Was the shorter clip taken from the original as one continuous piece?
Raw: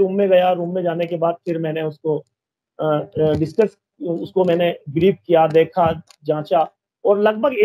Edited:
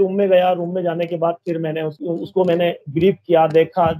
no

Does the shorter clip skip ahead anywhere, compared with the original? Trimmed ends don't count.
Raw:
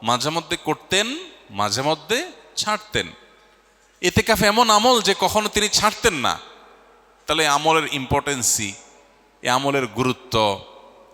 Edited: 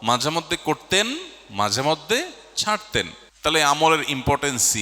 yes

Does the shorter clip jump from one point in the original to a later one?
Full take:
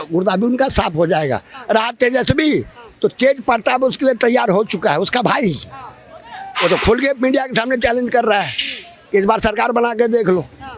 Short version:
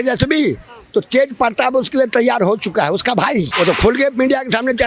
yes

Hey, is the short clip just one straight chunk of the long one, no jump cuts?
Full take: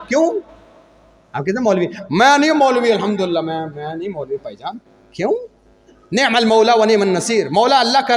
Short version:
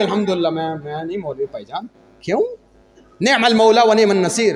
yes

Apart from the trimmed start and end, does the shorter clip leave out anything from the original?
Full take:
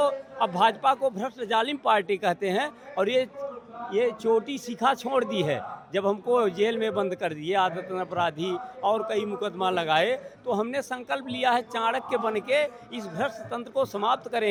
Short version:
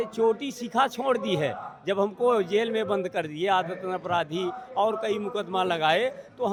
no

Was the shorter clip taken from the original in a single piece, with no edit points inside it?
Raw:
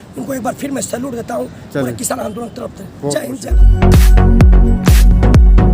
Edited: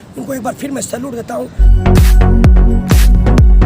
no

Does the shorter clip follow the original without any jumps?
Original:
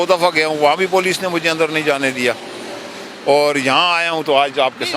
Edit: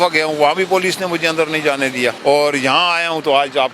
no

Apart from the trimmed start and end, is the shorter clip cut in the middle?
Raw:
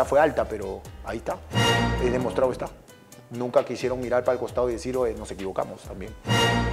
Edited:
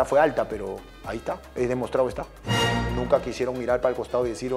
yes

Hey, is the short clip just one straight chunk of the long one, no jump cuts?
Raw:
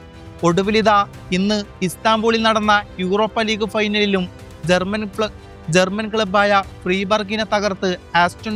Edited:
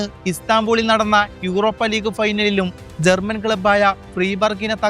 no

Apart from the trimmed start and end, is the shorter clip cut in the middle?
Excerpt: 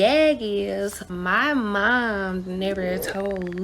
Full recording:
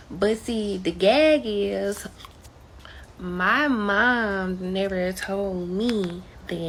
yes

